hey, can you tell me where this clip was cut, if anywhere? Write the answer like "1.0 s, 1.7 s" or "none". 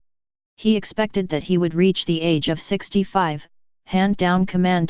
3.8 s

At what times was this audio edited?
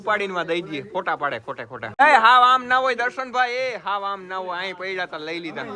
2.0 s

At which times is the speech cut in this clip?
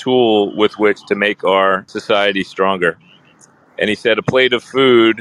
1.9 s

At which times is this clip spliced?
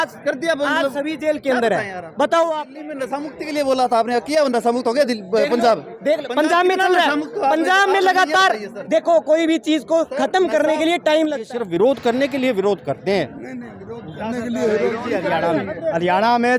2.6 s, 11.4 s

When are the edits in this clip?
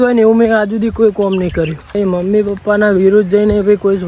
2.0 s

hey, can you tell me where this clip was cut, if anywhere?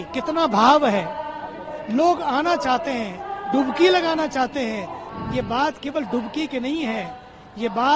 5.0 s

